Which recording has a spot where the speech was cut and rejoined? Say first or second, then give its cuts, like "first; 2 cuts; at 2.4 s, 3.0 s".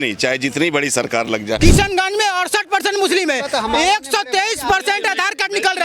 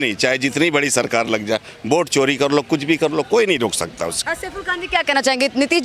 first; 1 cut; at 1.6 s